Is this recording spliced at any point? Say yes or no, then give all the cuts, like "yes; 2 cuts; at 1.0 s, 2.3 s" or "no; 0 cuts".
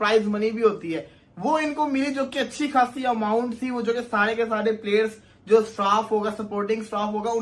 no; 0 cuts